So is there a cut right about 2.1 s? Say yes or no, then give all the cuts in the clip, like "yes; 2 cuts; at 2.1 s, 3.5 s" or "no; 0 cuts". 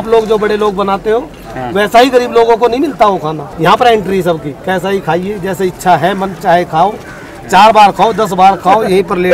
no; 1 cut; at 3.4 s